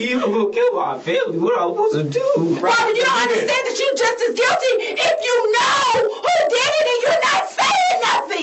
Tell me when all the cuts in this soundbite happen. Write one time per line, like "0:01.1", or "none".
0:02.6